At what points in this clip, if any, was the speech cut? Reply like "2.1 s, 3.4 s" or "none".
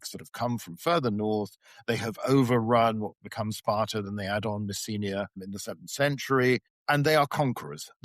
5.4 s, 6.7 s